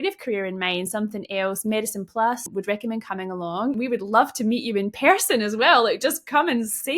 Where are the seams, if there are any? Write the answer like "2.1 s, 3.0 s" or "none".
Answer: 2.5 s, 3.8 s